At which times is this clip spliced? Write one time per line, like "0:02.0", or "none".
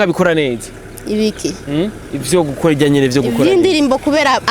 none

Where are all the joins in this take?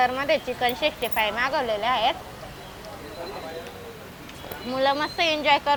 none

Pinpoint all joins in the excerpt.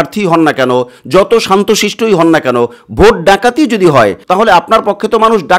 none

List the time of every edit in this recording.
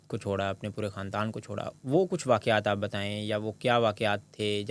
none

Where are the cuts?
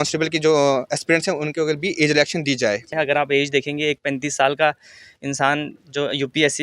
0:02.9

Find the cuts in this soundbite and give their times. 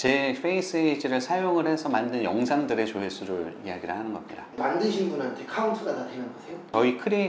none

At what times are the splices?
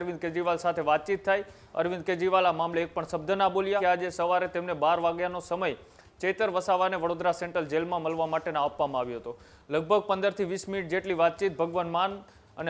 0:03.8

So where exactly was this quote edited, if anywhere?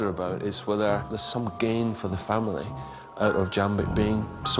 0:01.2

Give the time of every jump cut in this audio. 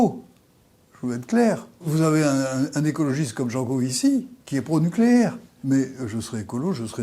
0:01.9
0:05.5

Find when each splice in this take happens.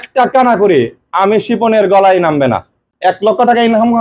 0:02.9

